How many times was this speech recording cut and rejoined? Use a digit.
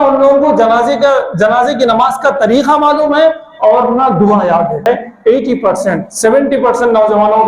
1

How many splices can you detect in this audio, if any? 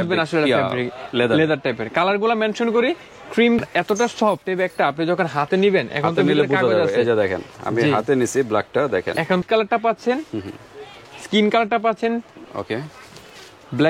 2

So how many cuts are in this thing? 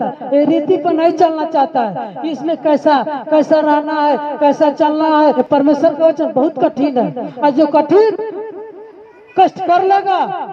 1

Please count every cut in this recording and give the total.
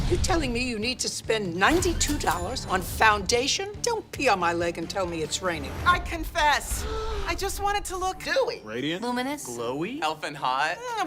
0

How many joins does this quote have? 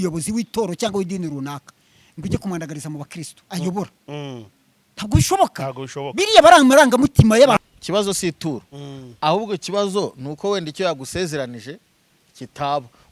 1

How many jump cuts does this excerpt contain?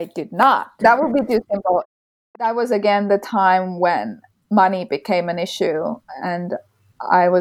2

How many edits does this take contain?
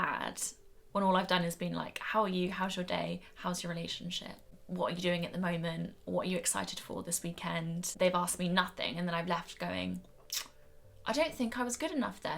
2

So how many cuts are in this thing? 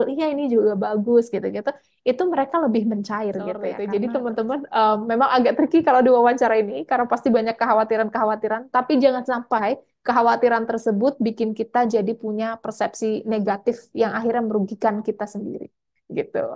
1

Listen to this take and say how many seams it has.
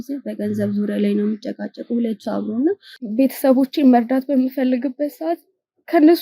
1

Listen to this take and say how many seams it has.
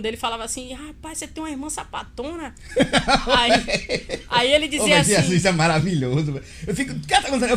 0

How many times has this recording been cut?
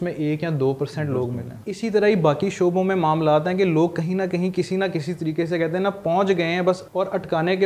2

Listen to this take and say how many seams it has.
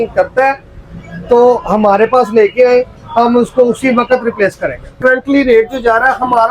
1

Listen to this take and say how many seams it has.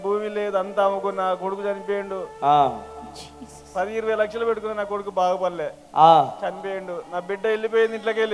0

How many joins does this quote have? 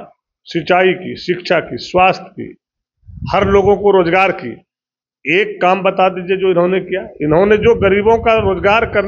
0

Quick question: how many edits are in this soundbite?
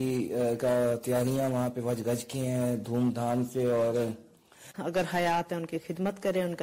1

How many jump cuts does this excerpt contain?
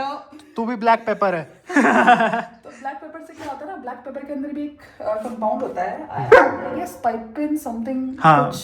0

